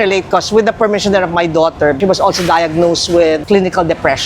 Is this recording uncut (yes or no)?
no